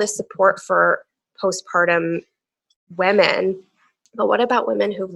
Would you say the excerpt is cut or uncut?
uncut